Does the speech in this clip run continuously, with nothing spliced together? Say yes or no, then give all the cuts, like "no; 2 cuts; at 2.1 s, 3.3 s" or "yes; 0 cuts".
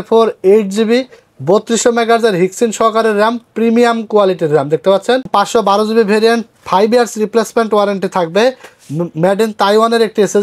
no; 1 cut; at 5.3 s